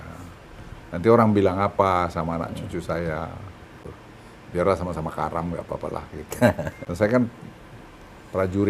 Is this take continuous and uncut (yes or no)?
no